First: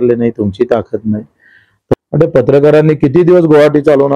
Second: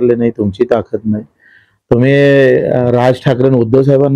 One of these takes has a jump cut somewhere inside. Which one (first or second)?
first